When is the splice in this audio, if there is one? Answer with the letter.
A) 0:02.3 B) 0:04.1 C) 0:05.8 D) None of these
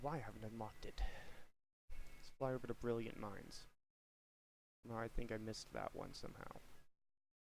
A